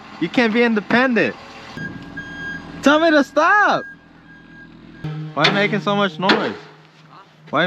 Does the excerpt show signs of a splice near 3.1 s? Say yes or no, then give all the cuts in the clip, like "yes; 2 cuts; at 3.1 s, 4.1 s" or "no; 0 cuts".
no; 2 cuts; at 1.8 s, 5.1 s